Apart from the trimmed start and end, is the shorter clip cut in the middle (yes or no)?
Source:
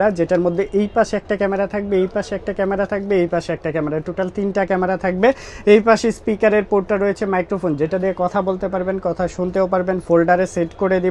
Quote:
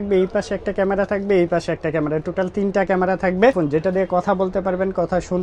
yes